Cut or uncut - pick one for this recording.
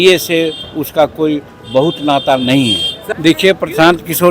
cut